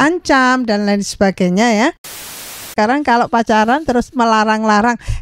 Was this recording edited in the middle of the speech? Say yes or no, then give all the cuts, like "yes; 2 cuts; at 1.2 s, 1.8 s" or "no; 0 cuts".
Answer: yes; 1 cut; at 2.5 s